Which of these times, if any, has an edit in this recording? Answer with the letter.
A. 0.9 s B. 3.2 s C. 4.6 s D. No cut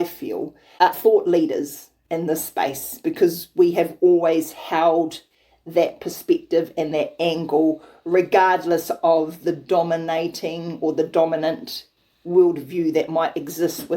A